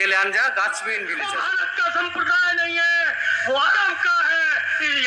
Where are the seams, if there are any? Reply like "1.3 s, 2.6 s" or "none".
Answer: 1.1 s

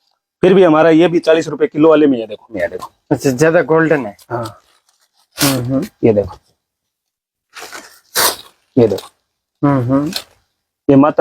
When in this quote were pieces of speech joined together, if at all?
2.6 s

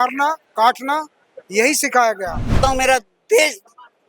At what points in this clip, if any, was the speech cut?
2.6 s

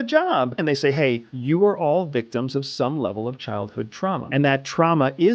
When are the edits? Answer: 0.9 s, 4.2 s

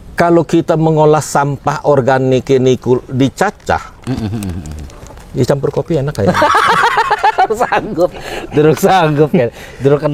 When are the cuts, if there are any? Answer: none

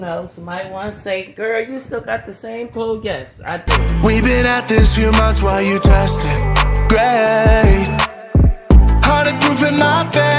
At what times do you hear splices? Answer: 3.6 s

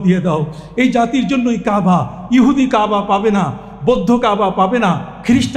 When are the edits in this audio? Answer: none

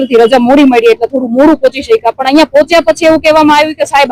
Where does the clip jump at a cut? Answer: none

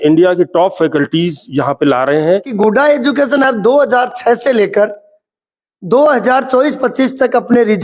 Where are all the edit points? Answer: 2.5 s

